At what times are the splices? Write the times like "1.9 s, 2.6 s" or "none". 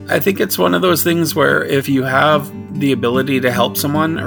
1.8 s, 2.6 s